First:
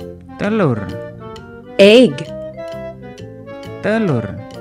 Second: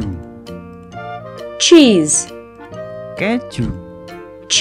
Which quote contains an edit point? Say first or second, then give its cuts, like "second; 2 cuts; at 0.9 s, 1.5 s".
first; 2 cuts; at 2.2 s, 3.8 s